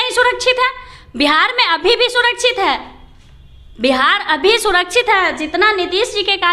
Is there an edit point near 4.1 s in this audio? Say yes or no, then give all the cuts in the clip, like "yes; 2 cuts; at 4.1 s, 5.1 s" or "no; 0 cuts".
no; 0 cuts